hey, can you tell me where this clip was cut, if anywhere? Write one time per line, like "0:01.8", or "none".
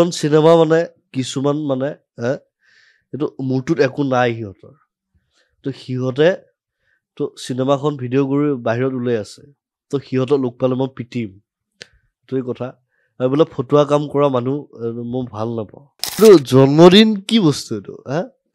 0:16.2

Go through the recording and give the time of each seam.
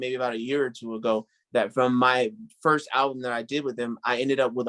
none

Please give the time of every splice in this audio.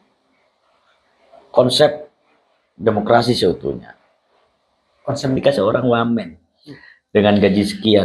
0:05.4

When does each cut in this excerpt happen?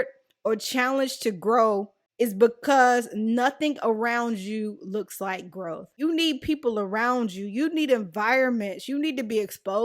0:02.0
0:05.9

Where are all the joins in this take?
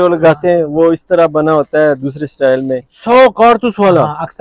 0:02.9

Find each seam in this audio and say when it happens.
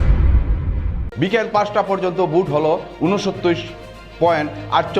0:01.0

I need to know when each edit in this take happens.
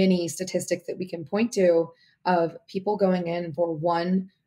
none

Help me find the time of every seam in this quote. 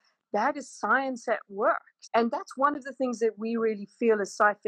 0:01.9

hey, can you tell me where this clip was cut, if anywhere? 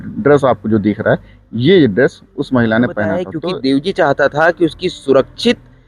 0:03.3

